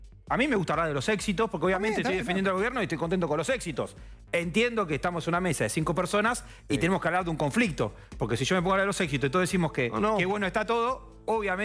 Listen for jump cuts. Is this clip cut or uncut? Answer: uncut